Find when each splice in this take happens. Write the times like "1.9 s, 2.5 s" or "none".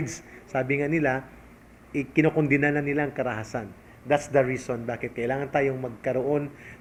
none